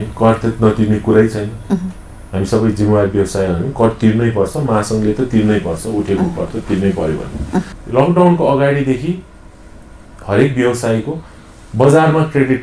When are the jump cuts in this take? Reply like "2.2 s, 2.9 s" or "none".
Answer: 7.8 s